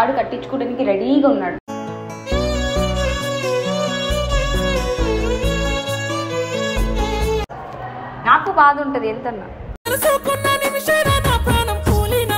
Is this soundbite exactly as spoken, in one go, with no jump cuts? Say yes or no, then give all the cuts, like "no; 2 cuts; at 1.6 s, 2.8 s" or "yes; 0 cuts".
no; 1 cut; at 7.5 s